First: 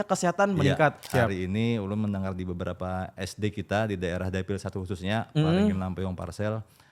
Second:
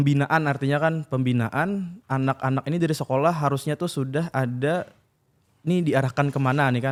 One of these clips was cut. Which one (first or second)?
first